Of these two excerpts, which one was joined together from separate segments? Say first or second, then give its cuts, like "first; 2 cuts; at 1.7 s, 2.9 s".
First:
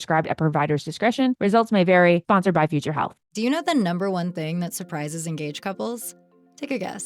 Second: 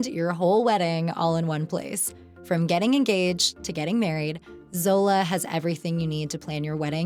first; 1 cut; at 3.3 s